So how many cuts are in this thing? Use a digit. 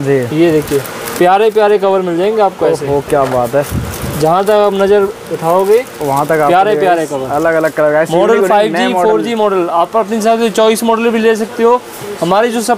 0